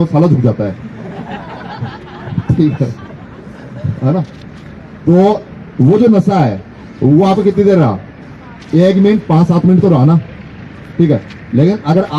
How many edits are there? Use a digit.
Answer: 0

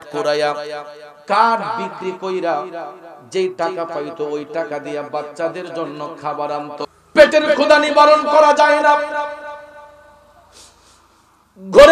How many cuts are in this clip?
1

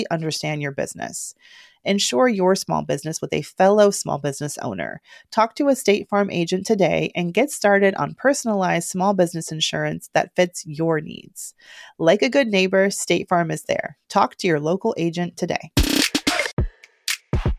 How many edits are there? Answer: 1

